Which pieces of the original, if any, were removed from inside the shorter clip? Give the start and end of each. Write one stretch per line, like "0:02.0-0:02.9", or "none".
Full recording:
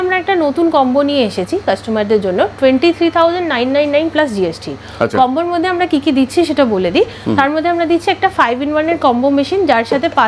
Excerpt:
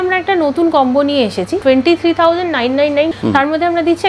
0:01.6-0:02.5
0:04.1-0:07.2